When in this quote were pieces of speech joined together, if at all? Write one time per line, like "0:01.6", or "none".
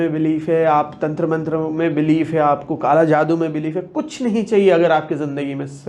none